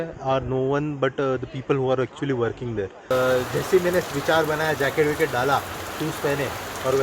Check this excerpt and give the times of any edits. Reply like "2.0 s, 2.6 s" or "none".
3.1 s